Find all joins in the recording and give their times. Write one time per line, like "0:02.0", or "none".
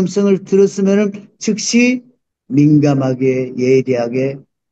0:02.3